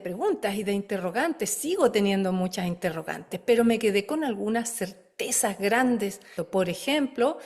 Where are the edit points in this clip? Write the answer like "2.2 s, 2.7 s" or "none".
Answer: 6.3 s